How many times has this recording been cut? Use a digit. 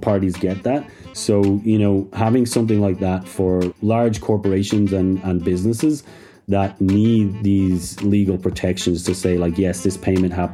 1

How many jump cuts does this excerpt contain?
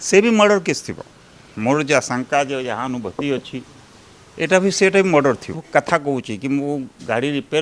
1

